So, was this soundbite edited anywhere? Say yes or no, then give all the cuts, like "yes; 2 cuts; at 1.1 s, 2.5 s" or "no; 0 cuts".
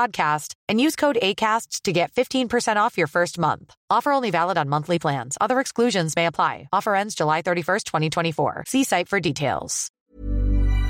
yes; 1 cut; at 9.9 s